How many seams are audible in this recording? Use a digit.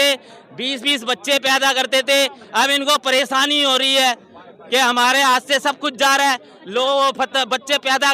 0